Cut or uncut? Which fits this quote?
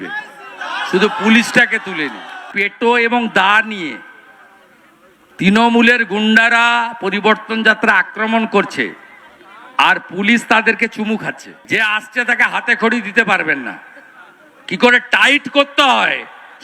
cut